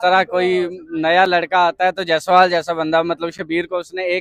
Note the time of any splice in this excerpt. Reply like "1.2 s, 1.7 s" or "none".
none